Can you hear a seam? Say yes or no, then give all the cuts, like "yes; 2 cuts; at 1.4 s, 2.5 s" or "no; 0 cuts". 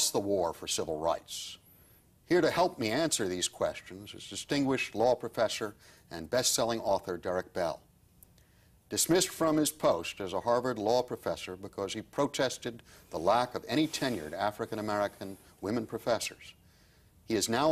no; 0 cuts